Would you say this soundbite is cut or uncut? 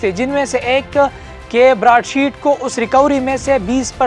uncut